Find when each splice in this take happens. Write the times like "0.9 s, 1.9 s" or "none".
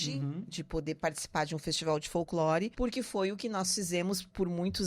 2.7 s